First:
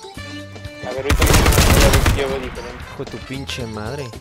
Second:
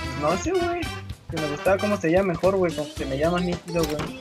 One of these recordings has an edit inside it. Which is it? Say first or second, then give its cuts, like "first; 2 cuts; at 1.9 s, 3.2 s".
second; 1 cut; at 1.5 s